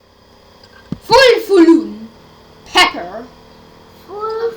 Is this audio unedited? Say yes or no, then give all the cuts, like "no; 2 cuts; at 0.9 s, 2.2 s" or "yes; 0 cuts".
no; 1 cut; at 3.1 s